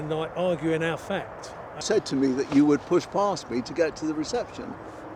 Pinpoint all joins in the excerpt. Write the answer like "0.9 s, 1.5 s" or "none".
1.7 s